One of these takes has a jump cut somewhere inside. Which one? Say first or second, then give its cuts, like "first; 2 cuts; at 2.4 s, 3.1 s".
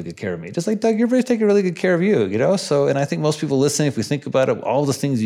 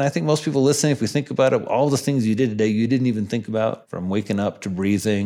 second; 1 cut; at 3.9 s